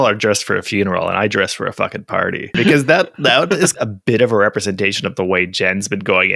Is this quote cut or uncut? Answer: cut